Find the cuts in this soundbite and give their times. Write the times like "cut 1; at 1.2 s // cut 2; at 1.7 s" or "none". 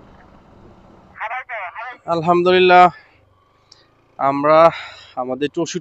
cut 1; at 1.3 s